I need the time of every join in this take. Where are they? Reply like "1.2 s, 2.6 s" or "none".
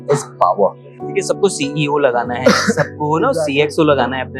1.0 s